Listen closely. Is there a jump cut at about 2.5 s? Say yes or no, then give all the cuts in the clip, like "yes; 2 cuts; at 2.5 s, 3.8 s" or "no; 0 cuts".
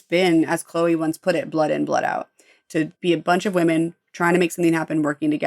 yes; 1 cut; at 2.5 s